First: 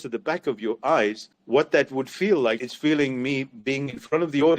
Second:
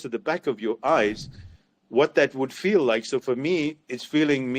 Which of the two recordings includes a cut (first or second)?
first